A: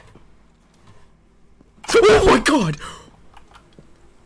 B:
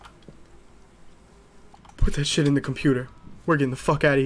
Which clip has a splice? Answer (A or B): B